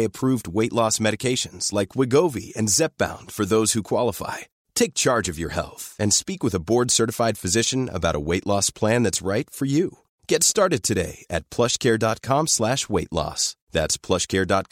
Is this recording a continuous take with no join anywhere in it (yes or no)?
yes